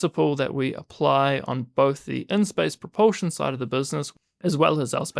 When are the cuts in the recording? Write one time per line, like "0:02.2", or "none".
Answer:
0:04.1

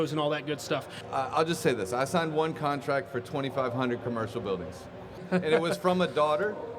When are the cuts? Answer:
0:01.0
0:05.2

